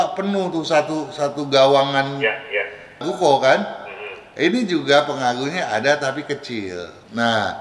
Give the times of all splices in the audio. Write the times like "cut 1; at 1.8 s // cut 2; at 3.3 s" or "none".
none